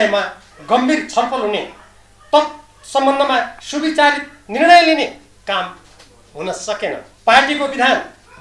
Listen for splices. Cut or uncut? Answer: cut